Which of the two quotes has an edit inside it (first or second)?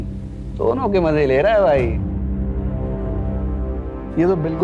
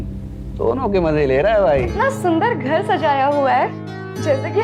second